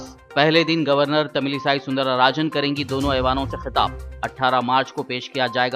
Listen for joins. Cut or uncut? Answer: uncut